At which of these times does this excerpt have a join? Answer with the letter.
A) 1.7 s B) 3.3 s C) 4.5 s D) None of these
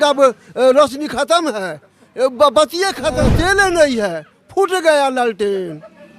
B